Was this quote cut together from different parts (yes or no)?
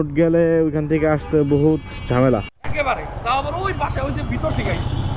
no